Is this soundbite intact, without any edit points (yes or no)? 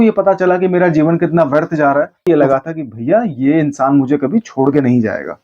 no